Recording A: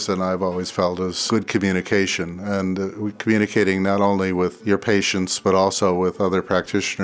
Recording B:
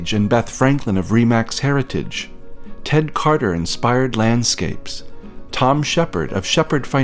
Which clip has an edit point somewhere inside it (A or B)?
A